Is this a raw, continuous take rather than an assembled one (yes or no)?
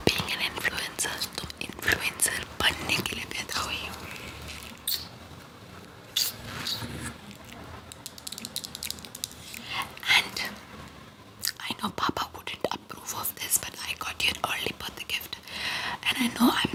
yes